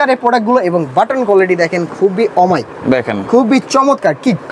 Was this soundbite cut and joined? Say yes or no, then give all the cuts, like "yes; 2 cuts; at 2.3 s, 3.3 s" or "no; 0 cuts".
no; 0 cuts